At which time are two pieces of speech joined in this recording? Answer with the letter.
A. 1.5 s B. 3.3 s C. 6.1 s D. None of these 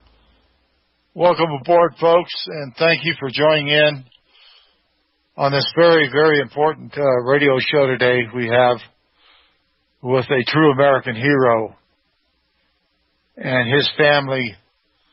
C